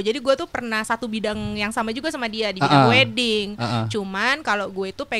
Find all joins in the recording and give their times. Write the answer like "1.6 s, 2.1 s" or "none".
none